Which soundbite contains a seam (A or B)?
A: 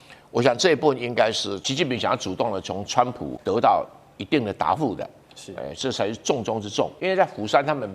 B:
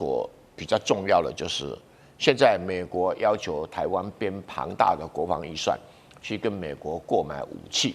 A